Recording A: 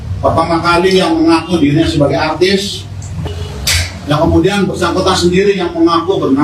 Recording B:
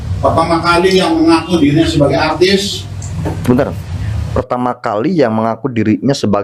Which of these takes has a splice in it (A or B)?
A